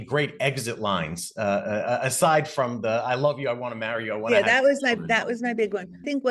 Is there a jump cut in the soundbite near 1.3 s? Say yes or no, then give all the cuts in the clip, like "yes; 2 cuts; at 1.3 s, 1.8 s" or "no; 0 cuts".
no; 0 cuts